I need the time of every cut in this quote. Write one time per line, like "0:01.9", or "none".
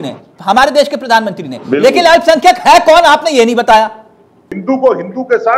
0:04.5